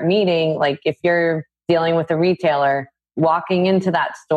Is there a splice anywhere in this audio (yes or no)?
yes